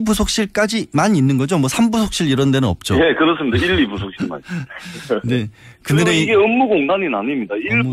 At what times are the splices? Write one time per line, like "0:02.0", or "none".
0:01.5